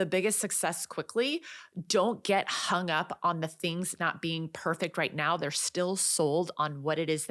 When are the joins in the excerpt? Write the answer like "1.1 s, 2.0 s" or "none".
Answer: none

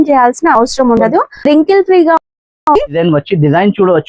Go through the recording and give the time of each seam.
3.0 s

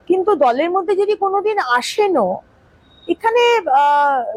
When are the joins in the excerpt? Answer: none

